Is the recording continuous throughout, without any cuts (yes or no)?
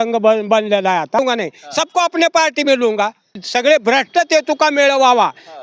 no